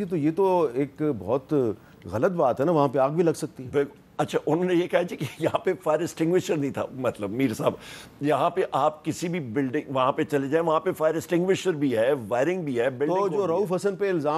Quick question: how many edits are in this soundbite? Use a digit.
0